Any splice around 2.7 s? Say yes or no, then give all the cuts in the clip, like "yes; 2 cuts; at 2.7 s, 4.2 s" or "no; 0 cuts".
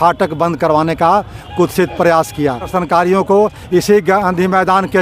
yes; 1 cut; at 2.7 s